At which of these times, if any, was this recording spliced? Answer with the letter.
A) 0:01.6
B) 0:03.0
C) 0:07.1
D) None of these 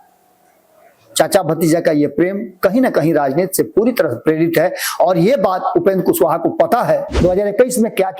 C